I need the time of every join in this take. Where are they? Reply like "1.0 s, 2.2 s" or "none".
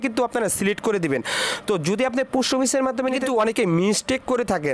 3.2 s

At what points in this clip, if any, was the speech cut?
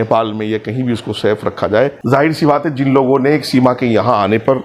2.0 s

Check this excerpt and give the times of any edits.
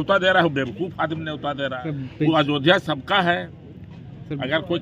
1.8 s

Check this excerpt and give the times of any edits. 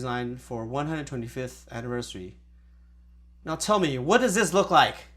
none

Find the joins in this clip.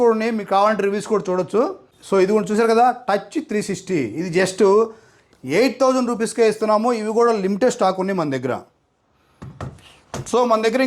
1.9 s

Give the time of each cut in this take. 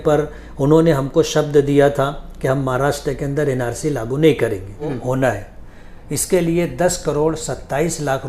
4.9 s

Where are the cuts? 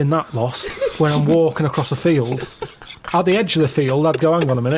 none

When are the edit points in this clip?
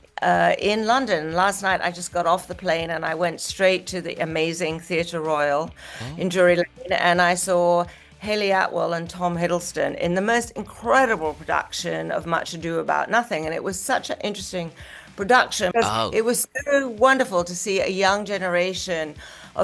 15.7 s

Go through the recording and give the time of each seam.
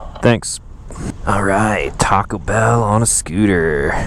none

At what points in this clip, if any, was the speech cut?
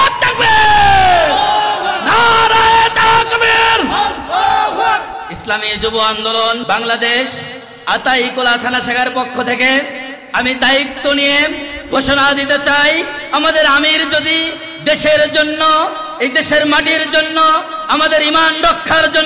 5.1 s, 6.6 s

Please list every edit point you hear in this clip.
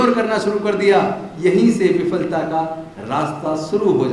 none

